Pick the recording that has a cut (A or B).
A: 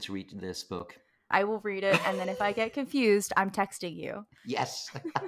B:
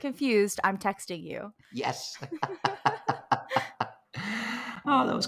A